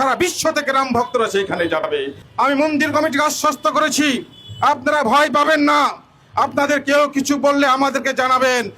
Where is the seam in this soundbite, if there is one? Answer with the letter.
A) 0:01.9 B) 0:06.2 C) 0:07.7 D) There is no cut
A